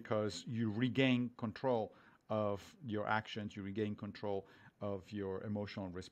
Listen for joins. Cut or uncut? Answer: uncut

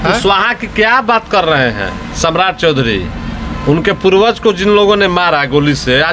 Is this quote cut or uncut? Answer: uncut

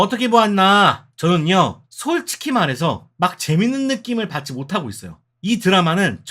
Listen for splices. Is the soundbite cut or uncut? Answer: cut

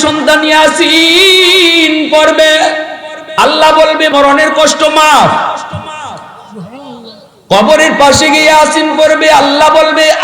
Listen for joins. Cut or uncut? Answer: cut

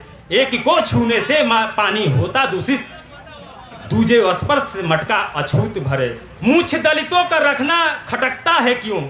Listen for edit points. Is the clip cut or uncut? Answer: cut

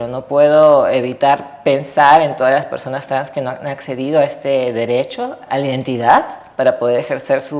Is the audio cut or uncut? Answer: cut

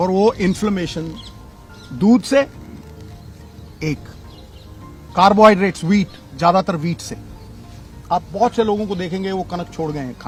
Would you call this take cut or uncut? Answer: uncut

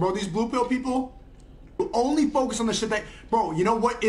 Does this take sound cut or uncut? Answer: uncut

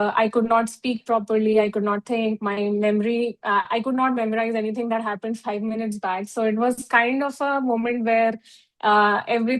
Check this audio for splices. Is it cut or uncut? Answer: uncut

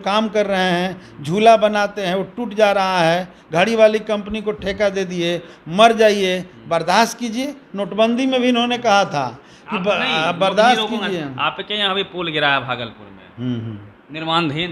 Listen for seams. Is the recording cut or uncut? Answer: uncut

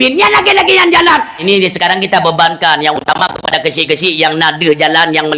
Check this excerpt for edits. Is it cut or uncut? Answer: cut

